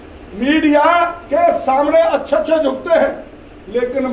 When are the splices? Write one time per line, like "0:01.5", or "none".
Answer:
none